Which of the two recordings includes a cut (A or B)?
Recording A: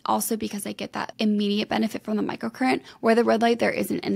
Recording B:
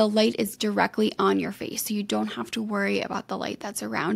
A